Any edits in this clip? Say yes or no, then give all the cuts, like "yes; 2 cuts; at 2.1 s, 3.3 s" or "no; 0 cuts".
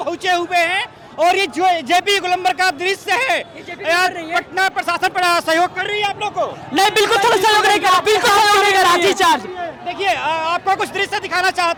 no; 0 cuts